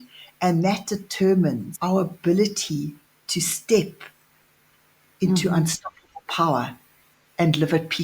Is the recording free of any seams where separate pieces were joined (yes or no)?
no